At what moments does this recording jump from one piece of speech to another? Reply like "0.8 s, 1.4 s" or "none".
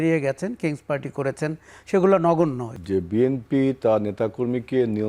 2.7 s